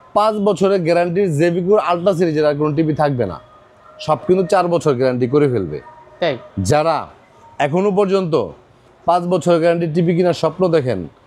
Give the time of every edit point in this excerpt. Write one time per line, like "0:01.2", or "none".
none